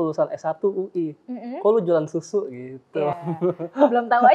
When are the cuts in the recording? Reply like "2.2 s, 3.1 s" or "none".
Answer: none